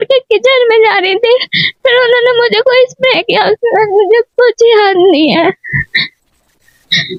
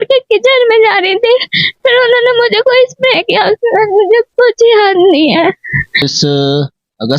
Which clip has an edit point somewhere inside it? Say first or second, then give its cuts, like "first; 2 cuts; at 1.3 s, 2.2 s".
second; 1 cut; at 6.0 s